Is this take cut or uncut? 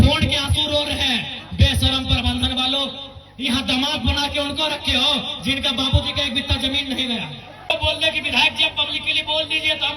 cut